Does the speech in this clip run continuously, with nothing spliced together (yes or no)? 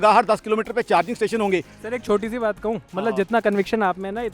no